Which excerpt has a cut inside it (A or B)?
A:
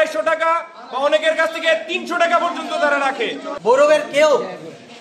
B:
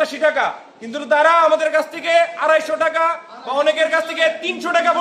A